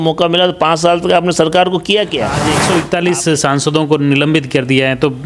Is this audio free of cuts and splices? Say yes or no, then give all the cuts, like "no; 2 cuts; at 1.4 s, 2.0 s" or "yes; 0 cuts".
no; 1 cut; at 2.5 s